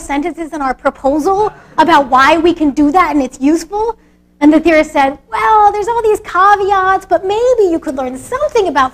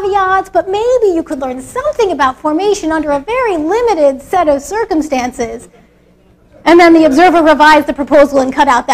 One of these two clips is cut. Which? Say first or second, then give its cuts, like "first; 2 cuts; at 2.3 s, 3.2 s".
second; 1 cut; at 3.8 s